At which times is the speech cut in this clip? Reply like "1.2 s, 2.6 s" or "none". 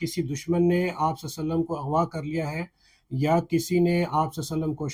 none